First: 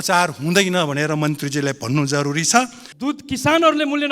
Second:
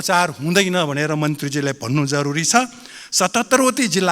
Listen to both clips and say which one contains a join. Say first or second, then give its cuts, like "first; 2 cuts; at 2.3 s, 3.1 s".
first; 1 cut; at 2.8 s